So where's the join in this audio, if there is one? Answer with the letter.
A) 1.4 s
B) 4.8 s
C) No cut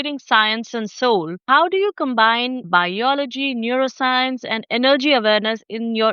A